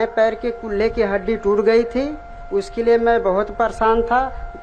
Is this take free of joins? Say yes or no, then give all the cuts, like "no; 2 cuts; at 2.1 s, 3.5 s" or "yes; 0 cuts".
yes; 0 cuts